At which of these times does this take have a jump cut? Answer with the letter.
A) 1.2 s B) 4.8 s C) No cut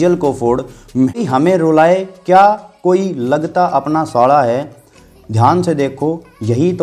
A